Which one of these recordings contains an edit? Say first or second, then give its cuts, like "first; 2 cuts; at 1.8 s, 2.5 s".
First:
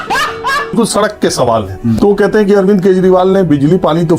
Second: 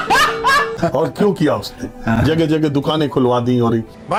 first; 2 cuts; at 0.7 s, 2.0 s